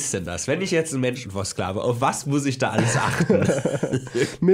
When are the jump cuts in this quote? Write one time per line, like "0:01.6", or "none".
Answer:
none

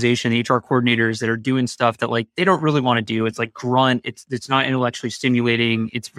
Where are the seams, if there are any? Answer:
none

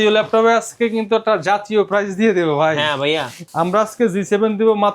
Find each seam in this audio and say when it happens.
0:03.4

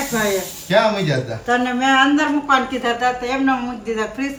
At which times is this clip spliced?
none

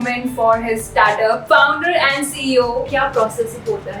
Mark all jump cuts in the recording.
0:01.4
0:02.9

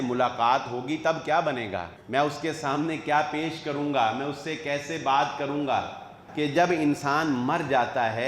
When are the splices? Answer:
0:02.0
0:06.2

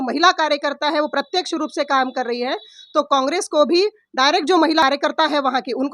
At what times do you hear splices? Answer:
0:04.8

